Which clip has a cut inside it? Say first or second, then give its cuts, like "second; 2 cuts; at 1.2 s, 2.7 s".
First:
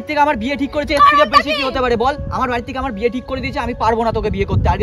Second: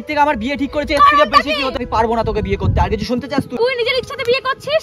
second; 2 cuts; at 1.8 s, 3.6 s